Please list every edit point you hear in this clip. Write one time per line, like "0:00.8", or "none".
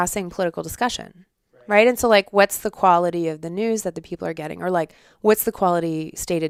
none